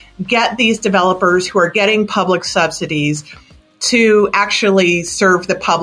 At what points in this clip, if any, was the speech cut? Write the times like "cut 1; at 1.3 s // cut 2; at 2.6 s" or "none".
none

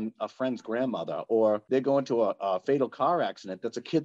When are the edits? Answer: cut 1; at 1.6 s

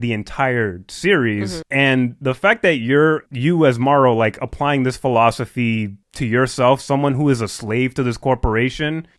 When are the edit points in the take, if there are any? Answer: none

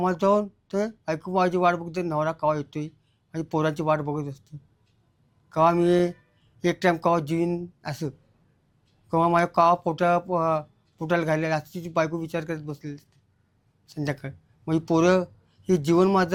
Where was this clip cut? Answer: none

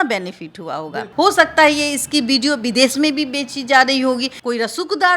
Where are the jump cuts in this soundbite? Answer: cut 1; at 1.1 s // cut 2; at 4.3 s

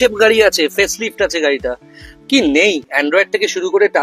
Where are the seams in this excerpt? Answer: none

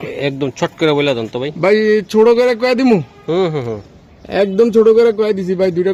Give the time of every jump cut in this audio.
none

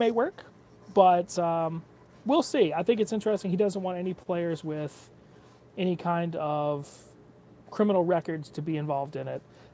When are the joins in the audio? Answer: none

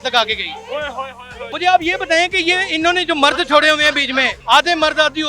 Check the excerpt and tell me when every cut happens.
cut 1; at 1.5 s // cut 2; at 4.3 s

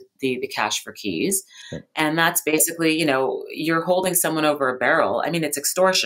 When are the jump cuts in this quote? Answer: none

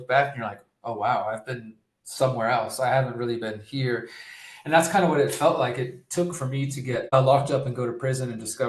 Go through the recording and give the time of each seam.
cut 1; at 7.1 s

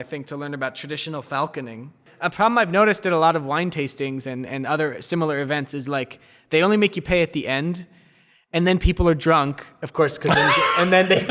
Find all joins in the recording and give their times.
cut 1; at 2.1 s

